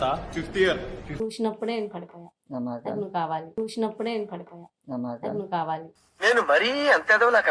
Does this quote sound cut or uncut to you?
cut